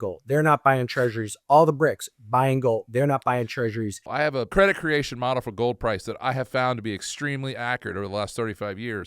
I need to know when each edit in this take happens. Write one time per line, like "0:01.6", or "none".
0:04.2